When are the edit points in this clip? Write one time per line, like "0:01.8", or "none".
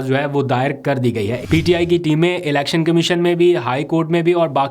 0:01.4